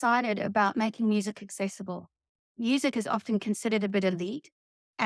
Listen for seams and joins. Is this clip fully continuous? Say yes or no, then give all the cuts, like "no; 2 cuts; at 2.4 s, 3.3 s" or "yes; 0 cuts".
no; 1 cut; at 2.6 s